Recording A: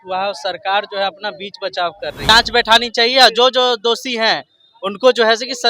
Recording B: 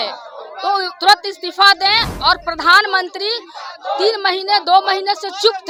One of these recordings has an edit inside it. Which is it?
A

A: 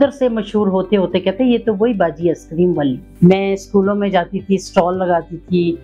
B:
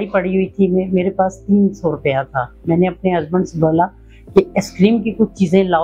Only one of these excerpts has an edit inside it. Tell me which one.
A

